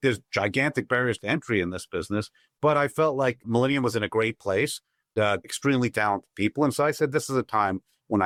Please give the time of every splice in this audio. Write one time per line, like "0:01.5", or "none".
none